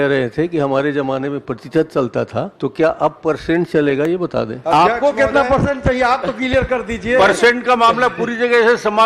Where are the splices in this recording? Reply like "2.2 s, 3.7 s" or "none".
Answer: 2.5 s, 4.6 s